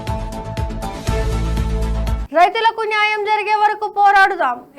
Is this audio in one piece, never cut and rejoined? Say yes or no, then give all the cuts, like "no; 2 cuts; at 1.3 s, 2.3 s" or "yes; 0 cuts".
no; 1 cut; at 2.2 s